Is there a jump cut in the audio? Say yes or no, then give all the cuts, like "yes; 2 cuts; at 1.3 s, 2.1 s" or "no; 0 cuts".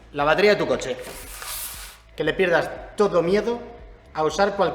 yes; 1 cut; at 2.0 s